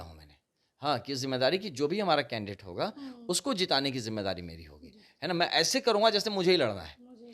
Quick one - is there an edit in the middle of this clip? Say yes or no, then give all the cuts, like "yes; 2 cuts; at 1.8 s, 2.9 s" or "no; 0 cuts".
no; 0 cuts